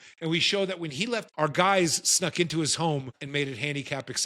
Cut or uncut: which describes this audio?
cut